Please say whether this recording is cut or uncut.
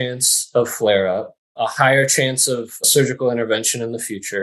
cut